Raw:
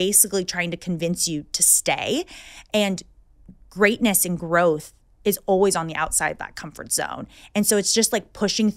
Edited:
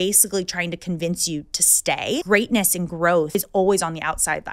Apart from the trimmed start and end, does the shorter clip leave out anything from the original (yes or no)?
yes